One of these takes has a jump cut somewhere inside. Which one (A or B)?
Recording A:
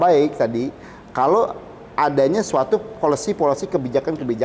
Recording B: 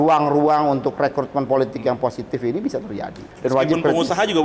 B